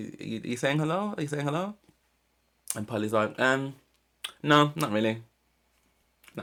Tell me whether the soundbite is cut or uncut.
uncut